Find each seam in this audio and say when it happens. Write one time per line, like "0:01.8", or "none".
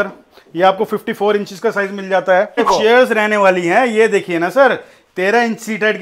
0:02.6